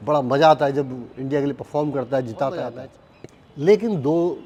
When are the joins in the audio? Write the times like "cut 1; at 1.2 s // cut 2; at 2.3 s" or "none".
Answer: none